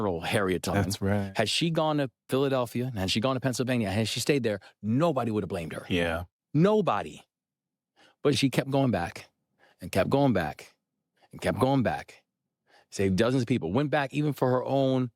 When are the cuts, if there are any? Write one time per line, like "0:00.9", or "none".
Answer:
0:01.3